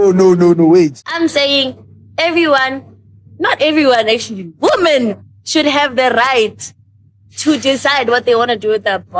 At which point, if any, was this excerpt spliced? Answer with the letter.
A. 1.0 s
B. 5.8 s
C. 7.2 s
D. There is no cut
A